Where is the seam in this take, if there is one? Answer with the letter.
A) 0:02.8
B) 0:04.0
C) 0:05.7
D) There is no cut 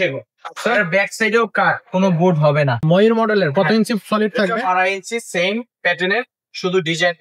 A